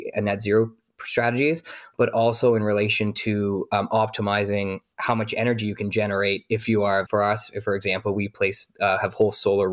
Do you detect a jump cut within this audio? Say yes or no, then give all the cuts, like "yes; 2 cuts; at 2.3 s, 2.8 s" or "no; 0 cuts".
no; 0 cuts